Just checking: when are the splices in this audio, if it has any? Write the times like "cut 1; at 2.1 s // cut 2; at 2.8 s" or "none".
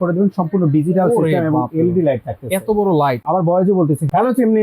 cut 1; at 3.2 s